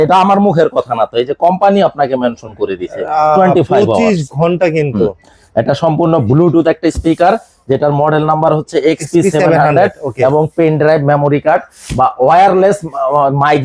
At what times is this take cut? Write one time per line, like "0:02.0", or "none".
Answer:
none